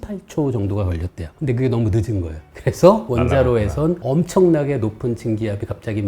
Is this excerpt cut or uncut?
uncut